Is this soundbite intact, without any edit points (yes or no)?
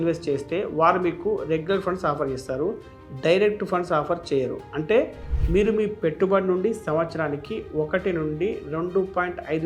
yes